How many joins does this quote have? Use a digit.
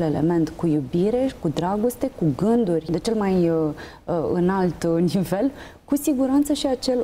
1